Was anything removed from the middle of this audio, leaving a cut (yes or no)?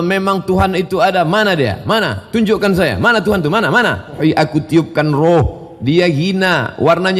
yes